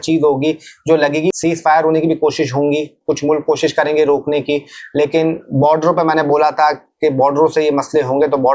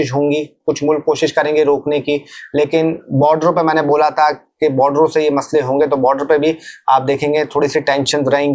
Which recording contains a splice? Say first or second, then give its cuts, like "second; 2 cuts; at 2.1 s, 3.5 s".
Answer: first; 1 cut; at 1.3 s